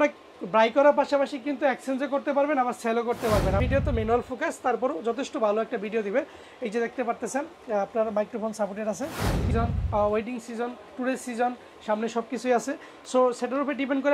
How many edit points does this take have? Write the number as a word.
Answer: two